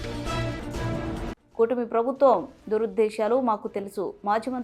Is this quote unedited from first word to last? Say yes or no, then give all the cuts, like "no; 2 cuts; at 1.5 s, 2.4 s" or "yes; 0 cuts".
yes; 0 cuts